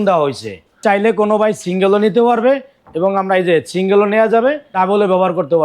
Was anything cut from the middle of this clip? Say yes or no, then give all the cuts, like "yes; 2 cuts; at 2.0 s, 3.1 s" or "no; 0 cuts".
yes; 2 cuts; at 0.8 s, 4.7 s